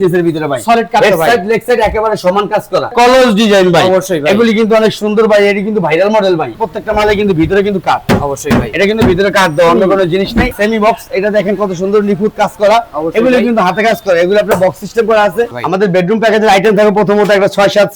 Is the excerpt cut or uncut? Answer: cut